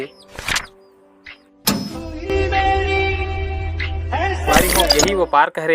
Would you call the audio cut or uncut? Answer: cut